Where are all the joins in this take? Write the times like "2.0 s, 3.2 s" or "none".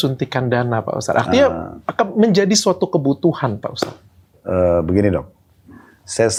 none